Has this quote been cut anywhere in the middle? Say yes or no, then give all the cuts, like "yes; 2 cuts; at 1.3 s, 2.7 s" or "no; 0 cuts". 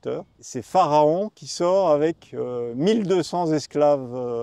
no; 0 cuts